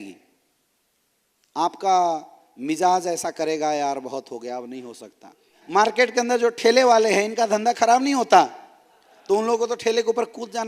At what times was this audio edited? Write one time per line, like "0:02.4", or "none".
0:05.6